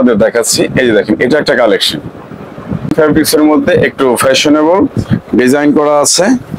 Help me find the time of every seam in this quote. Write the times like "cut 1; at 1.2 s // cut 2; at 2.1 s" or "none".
cut 1; at 2.9 s